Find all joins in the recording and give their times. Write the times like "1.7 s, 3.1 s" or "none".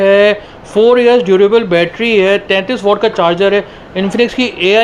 none